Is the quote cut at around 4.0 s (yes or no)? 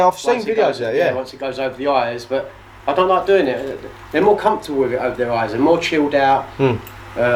no